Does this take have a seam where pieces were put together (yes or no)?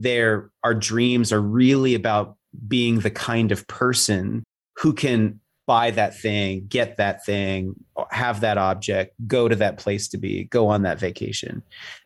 yes